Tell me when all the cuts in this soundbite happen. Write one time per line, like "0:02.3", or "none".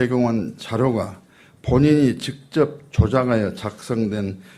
none